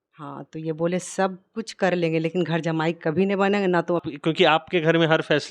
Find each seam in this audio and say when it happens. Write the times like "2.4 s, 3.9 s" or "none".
4.0 s